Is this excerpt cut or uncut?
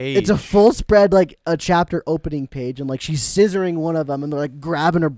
uncut